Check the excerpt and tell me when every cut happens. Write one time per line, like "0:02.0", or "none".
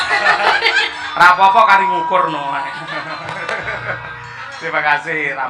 none